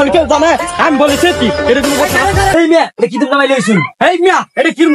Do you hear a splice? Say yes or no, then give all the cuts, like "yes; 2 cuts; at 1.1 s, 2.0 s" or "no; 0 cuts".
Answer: yes; 1 cut; at 2.5 s